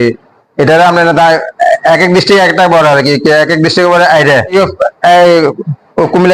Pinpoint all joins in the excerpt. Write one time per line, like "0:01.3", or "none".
0:04.5